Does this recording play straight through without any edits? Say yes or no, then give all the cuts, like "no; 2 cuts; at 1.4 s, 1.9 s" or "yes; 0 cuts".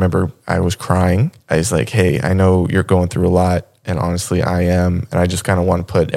no; 1 cut; at 1.3 s